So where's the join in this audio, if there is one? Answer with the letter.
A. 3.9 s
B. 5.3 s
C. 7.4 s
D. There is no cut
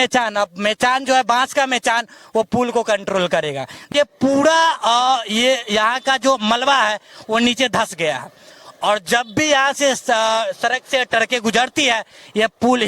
A